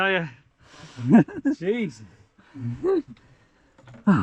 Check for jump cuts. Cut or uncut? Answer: uncut